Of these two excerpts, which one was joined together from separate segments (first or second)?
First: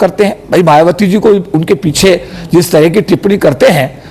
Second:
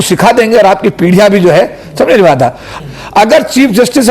second